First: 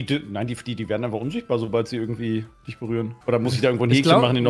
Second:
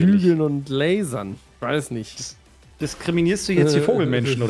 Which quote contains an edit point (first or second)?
first